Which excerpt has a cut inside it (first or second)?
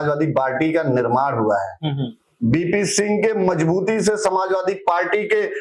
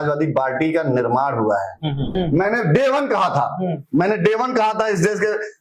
second